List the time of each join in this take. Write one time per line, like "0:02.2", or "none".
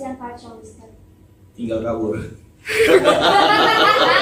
none